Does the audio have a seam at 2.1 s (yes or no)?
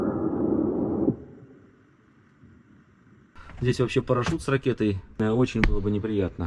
no